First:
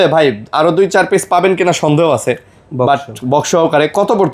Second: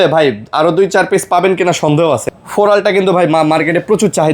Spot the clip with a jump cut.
second; 1 cut; at 2.4 s

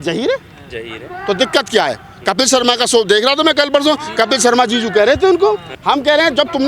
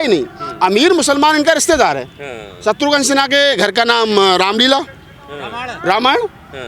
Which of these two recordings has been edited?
first; 1 cut; at 5.7 s

